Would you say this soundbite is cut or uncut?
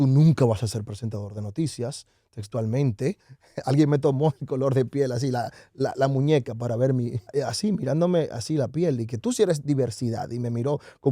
cut